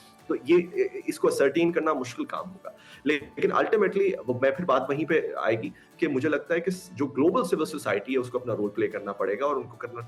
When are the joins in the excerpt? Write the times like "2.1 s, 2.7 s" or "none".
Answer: none